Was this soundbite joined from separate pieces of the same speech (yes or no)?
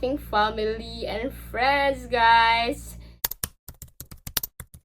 yes